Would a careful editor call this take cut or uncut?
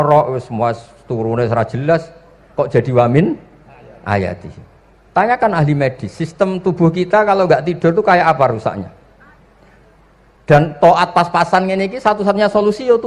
uncut